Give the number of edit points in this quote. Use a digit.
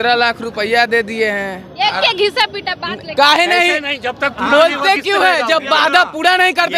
0